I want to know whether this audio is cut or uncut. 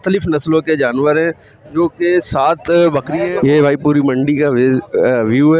cut